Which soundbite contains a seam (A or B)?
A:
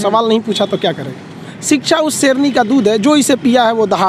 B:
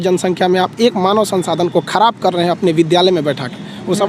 A